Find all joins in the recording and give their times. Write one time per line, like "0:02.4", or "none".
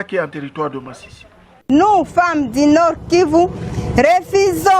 0:01.5